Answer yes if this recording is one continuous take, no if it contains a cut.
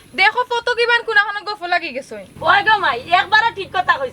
yes